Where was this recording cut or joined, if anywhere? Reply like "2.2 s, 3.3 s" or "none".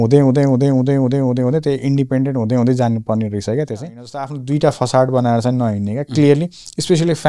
4.4 s